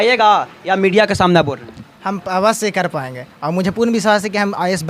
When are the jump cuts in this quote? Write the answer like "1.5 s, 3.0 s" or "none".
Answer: none